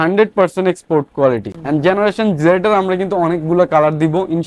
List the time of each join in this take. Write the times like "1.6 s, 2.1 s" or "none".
1.5 s